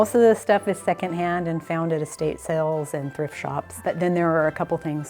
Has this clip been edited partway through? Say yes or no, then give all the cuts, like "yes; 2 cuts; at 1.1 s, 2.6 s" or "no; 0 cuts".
yes; 1 cut; at 3.8 s